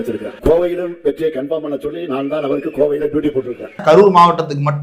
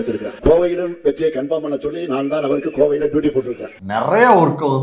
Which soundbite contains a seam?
second; 1 cut; at 3.6 s

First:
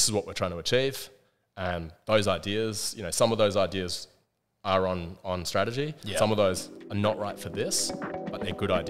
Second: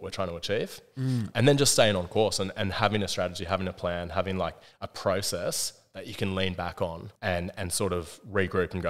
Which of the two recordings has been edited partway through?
second; 2 cuts; at 1.3 s, 7.1 s

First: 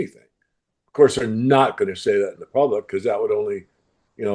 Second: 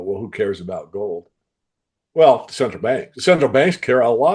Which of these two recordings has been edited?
second; 1 cut; at 3.1 s

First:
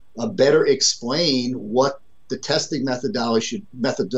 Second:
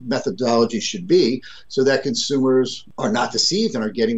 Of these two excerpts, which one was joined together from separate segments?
second; 1 cut; at 2.8 s

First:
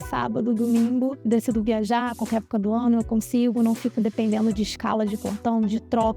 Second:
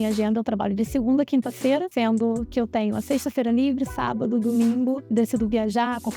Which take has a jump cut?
second; 1 cut; at 1.9 s

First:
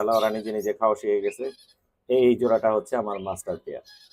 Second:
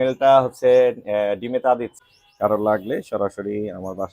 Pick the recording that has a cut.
second; 1 cut; at 1.9 s

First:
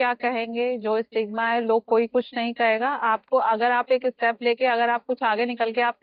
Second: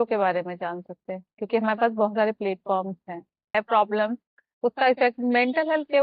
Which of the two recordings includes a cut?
second; 1 cut; at 3.5 s

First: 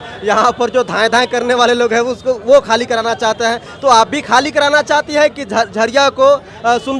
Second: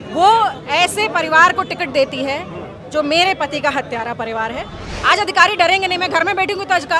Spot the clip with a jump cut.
second; 1 cut; at 4.8 s

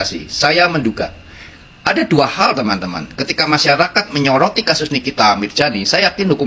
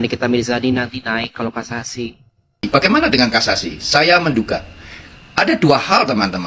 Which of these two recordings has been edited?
second; 1 cut; at 2.6 s

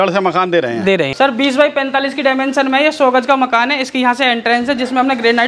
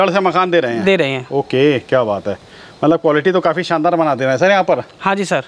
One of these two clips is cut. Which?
first; 1 cut; at 1.1 s

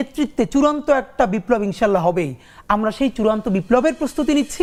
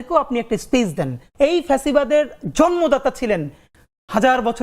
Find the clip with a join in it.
second; 1 cut; at 1.2 s

